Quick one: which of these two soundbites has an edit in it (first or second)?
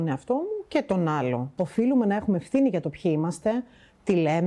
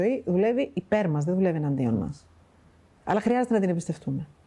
first